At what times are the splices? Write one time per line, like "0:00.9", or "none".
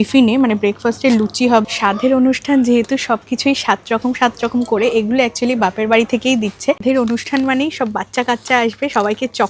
0:01.6
0:06.8